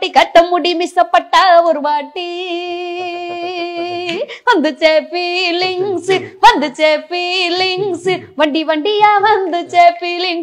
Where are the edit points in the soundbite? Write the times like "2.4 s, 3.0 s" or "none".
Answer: none